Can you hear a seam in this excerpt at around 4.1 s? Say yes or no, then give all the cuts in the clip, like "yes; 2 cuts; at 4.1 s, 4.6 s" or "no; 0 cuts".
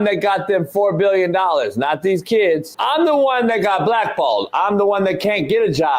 no; 1 cut; at 2.7 s